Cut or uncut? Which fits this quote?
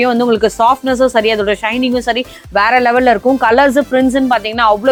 uncut